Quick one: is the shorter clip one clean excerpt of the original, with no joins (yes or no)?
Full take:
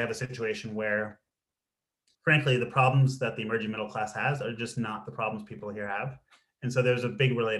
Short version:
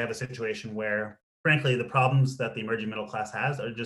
no